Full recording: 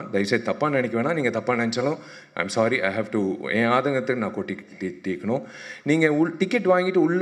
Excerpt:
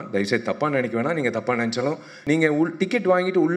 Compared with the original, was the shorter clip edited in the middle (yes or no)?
yes